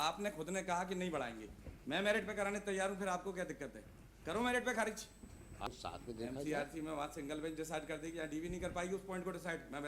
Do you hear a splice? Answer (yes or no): yes